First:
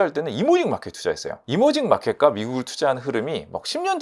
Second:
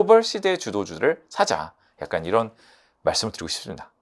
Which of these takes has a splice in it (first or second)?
first